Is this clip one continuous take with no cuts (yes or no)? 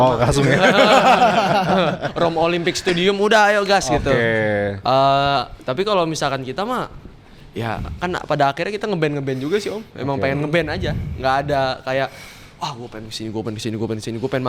yes